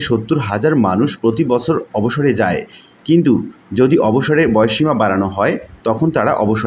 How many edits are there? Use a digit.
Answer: 0